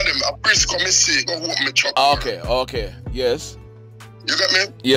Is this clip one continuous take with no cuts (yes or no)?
yes